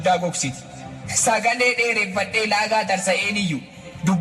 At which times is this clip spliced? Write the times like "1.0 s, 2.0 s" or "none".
3.3 s